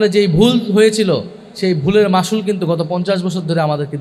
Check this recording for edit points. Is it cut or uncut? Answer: uncut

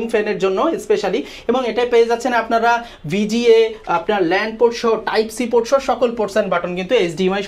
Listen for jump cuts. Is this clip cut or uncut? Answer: uncut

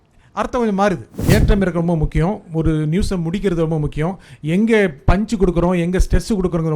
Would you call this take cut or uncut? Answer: cut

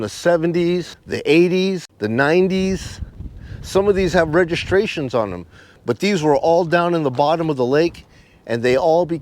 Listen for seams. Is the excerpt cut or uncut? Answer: cut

